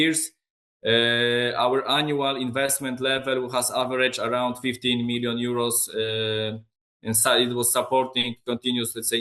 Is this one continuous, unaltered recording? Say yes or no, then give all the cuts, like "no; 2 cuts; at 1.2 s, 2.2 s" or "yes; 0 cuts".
yes; 0 cuts